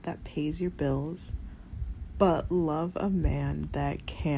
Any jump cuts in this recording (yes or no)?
no